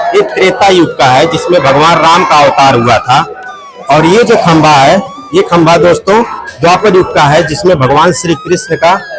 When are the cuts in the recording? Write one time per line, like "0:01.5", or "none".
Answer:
none